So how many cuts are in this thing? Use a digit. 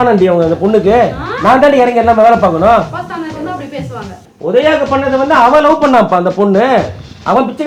1